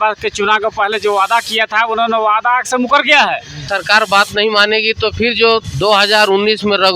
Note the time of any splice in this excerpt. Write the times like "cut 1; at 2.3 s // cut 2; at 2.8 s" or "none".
cut 1; at 3.7 s